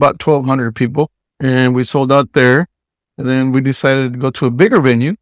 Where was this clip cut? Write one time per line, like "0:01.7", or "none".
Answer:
none